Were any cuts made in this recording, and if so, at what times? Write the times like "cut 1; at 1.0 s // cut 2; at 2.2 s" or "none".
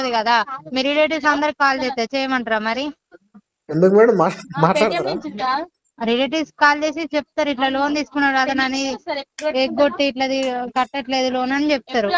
none